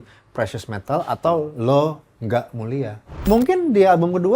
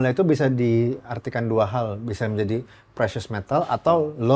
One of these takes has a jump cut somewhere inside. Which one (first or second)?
first